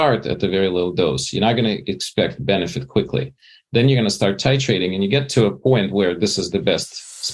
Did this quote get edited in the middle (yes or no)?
no